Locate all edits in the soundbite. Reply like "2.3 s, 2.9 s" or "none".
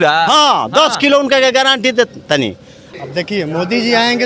2.8 s